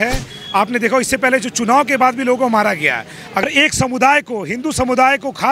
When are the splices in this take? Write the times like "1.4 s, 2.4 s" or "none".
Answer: 3.4 s